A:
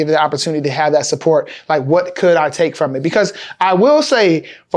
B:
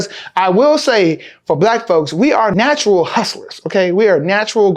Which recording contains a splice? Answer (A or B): B